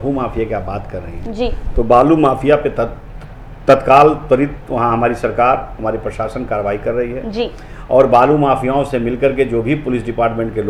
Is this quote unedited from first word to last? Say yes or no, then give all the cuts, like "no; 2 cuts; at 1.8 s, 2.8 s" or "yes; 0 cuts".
yes; 0 cuts